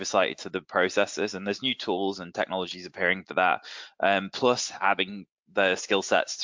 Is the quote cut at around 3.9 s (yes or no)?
no